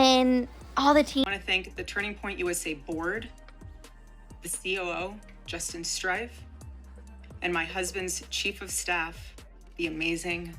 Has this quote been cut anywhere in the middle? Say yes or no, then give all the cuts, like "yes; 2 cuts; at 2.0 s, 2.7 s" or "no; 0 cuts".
yes; 1 cut; at 1.2 s